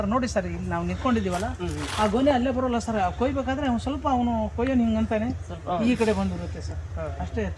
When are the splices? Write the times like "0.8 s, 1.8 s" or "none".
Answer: none